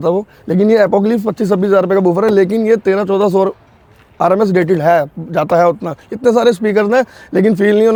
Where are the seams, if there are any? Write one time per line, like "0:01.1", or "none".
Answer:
none